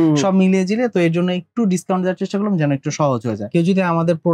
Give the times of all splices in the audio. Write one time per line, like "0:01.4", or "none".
0:03.4